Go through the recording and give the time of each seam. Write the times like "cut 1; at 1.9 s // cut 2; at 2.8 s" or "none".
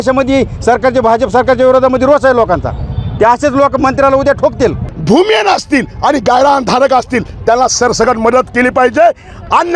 cut 1; at 4.9 s

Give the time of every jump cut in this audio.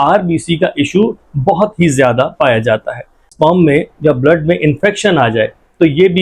cut 1; at 3.2 s

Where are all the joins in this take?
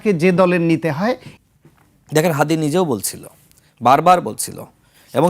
cut 1; at 1.3 s

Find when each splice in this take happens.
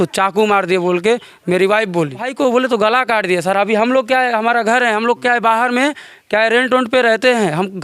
cut 1; at 2.3 s

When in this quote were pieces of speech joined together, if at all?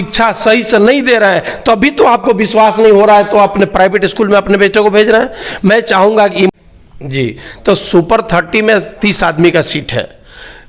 cut 1; at 6.5 s

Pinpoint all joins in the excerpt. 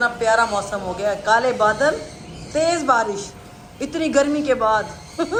none

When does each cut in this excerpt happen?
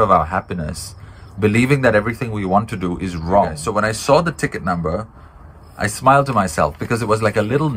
cut 1; at 3.6 s

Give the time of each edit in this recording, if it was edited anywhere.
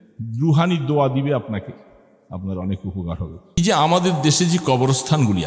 cut 1; at 3.6 s

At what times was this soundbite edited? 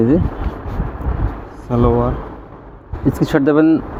none

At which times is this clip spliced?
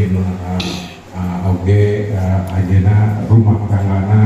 cut 1; at 1.0 s

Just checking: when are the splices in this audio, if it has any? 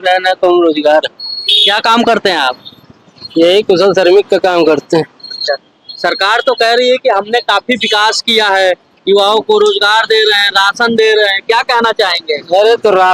none

